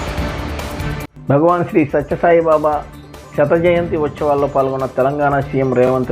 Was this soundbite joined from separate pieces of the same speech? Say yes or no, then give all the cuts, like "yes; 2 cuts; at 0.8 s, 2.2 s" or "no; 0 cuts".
yes; 1 cut; at 1.0 s